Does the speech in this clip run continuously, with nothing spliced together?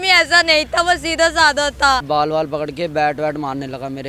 no; 1 cut; at 2.0 s

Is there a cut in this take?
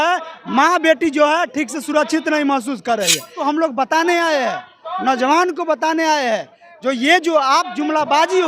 yes; 1 cut; at 3.3 s

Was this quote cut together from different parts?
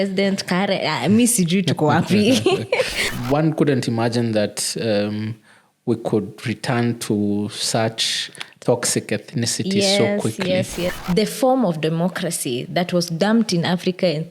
yes; 2 cuts; at 3.2 s, 11.0 s

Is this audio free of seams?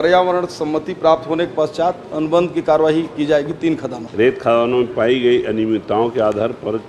no; 1 cut; at 4.0 s

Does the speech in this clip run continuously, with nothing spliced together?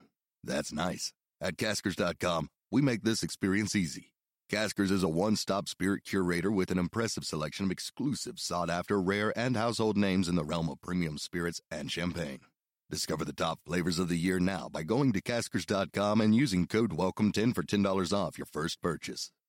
yes; 0 cuts

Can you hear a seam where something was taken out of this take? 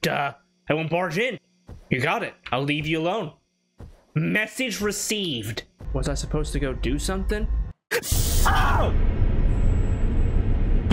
yes; 1 cut; at 5.8 s

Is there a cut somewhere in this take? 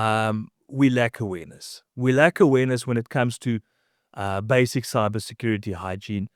no; 0 cuts

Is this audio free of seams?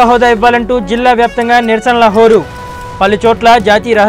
yes; 0 cuts

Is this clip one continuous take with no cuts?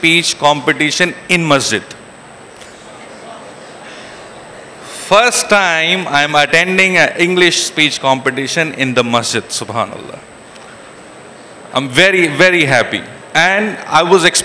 yes; 0 cuts

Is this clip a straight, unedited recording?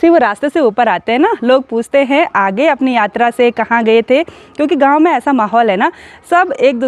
yes; 0 cuts

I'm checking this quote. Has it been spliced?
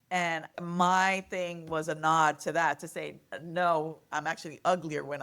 yes; 1 cut; at 4.0 s

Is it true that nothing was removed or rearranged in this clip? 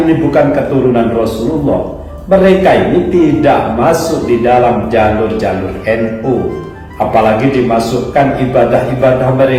yes; 0 cuts

